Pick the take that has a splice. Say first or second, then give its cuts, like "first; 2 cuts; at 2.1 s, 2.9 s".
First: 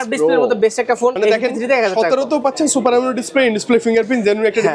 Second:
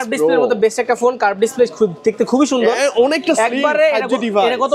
first; 1 cut; at 1.2 s